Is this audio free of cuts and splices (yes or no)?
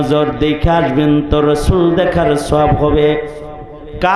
yes